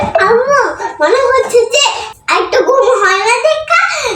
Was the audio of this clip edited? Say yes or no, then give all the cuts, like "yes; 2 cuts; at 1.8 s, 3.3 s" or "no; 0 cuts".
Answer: yes; 1 cut; at 2.1 s